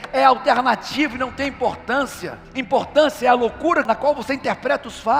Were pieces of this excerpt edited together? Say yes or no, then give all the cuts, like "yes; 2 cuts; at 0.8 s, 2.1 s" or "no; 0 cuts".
yes; 1 cut; at 3.8 s